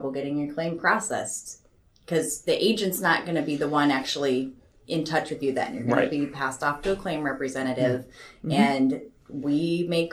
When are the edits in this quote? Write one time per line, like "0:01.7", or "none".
none